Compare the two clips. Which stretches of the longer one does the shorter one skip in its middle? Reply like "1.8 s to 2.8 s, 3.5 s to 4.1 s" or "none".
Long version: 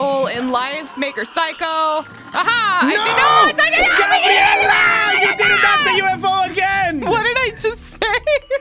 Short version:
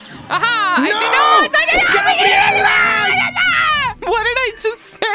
6.0 s to 7.0 s